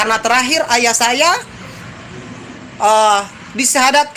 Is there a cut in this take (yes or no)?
no